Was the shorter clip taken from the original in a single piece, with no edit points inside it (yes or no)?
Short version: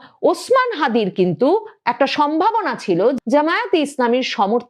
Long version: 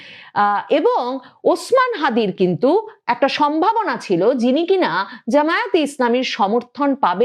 no